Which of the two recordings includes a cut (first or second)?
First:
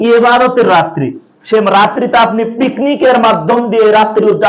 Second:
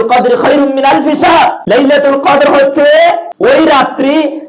second